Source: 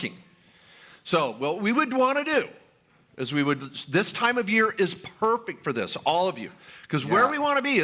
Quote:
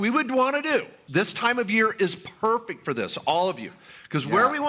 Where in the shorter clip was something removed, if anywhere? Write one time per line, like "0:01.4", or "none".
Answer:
0:01.0